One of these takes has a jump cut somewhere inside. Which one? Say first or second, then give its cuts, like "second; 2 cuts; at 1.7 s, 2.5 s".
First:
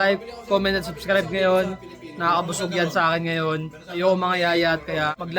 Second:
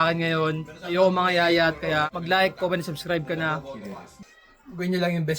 second; 1 cut; at 4.2 s